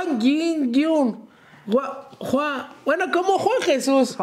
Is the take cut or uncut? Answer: uncut